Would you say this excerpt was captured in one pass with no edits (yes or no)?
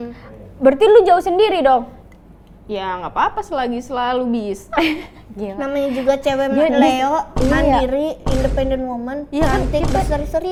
yes